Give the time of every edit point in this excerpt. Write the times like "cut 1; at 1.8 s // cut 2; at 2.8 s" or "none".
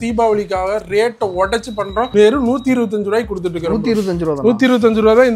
none